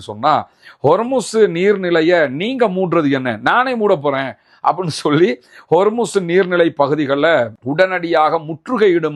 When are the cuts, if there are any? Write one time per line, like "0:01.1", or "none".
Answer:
none